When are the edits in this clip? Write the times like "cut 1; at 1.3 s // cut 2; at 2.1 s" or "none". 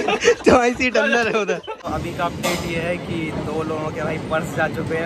cut 1; at 1.7 s

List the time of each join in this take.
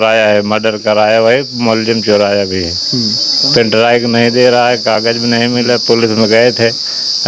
none

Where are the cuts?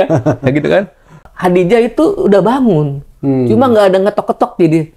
cut 1; at 1.3 s

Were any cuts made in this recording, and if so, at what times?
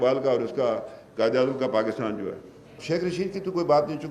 none

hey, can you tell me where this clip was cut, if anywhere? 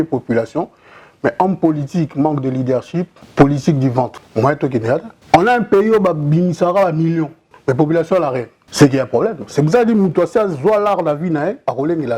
cut 1; at 3.2 s // cut 2; at 4.2 s // cut 3; at 5.1 s // cut 4; at 7.4 s // cut 5; at 8.6 s

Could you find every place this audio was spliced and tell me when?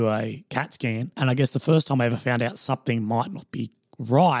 cut 1; at 1.2 s

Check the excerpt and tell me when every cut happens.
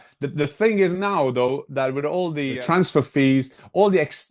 cut 1; at 2.6 s

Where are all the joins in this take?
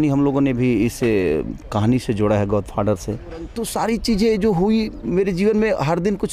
cut 1; at 3.6 s

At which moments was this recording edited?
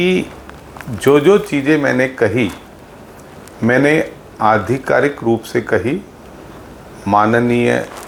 none

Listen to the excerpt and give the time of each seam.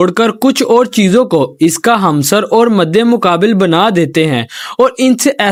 none

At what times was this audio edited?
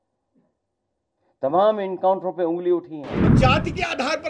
cut 1; at 3.3 s

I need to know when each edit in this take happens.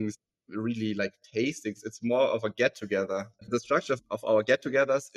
cut 1; at 3.5 s

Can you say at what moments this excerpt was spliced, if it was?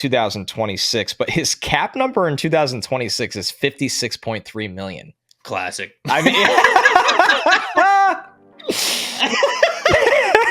none

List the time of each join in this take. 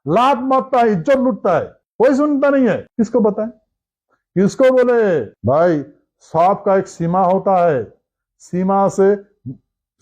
cut 1; at 1.8 s // cut 2; at 2.9 s // cut 3; at 5.3 s

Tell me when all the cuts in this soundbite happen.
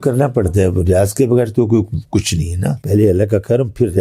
cut 1; at 2.8 s

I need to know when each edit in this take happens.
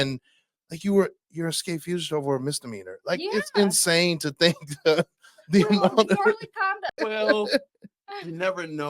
cut 1; at 6.9 s

